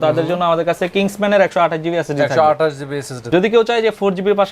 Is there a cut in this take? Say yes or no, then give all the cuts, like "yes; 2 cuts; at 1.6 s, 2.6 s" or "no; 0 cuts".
yes; 1 cut; at 3.1 s